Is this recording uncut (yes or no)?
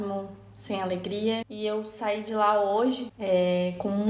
no